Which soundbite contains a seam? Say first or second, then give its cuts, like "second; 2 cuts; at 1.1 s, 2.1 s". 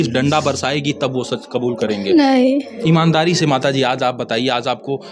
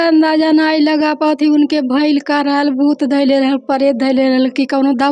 first; 1 cut; at 2.7 s